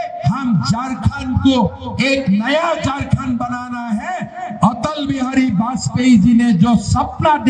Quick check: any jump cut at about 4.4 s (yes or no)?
no